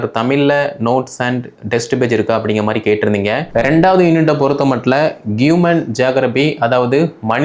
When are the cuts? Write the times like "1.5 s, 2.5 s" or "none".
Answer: 3.4 s